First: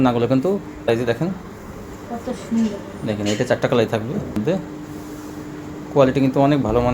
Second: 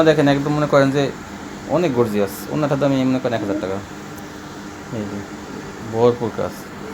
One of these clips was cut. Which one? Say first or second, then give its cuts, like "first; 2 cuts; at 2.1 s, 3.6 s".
first; 2 cuts; at 0.9 s, 4.4 s